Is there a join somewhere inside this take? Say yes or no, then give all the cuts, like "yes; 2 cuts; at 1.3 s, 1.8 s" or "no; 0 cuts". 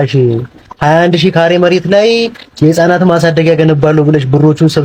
no; 0 cuts